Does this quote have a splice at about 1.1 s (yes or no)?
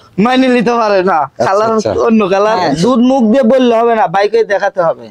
no